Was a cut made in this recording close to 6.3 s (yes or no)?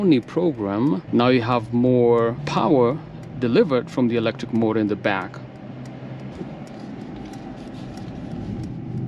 yes